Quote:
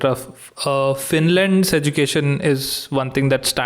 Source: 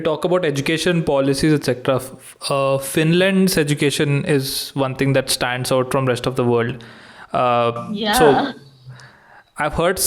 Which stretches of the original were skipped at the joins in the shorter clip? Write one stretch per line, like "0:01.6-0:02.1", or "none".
none